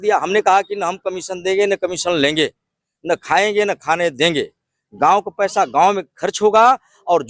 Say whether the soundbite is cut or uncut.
uncut